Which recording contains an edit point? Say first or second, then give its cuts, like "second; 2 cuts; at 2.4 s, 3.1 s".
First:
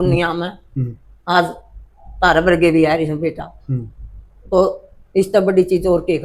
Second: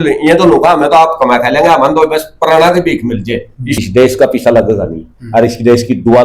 second; 1 cut; at 3.8 s